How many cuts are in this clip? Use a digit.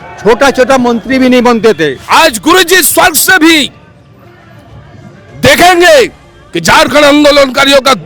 1